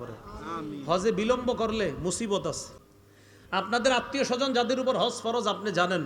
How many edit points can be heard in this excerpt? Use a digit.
1